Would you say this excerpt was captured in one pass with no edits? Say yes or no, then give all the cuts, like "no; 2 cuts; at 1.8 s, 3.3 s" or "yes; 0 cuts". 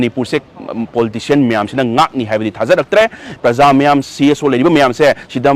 no; 1 cut; at 3.3 s